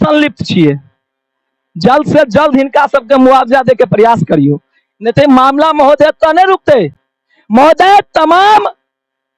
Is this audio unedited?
yes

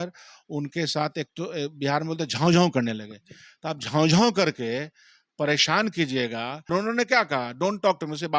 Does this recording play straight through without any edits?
no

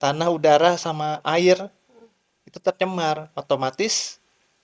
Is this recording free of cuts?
yes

